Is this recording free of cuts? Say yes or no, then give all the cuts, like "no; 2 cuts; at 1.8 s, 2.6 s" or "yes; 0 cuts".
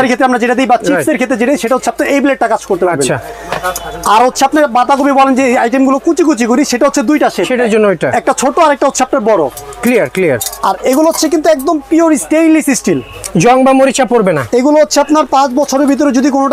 yes; 0 cuts